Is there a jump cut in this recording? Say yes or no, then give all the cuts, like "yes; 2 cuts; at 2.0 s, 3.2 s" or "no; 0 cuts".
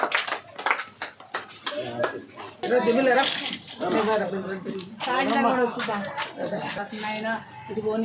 yes; 1 cut; at 6.7 s